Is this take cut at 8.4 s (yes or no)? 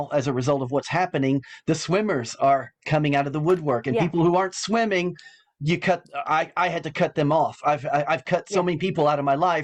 no